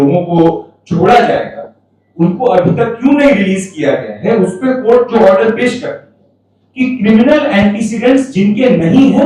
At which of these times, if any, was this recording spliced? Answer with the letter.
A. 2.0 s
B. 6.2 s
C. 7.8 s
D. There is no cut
D